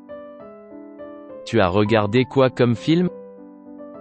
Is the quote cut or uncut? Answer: cut